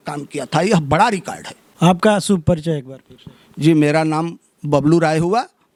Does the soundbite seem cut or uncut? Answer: uncut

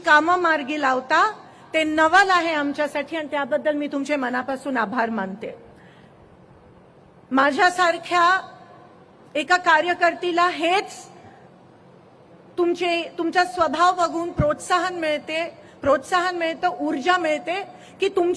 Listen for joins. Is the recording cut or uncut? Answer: uncut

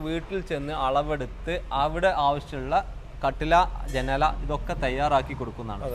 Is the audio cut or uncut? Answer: uncut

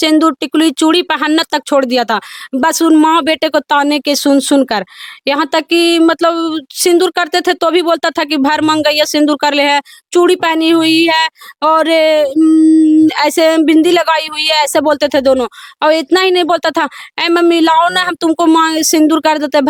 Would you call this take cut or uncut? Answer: uncut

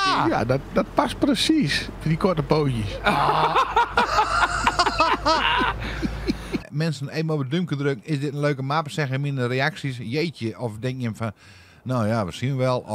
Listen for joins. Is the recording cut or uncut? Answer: cut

